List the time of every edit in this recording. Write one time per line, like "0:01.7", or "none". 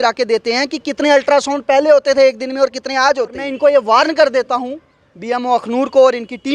0:03.5